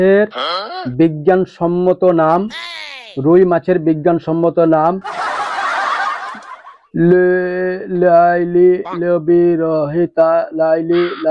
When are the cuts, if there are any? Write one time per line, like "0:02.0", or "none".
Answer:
none